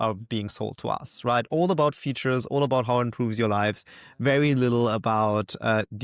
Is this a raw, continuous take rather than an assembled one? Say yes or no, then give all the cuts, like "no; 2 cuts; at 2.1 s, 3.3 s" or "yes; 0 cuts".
yes; 0 cuts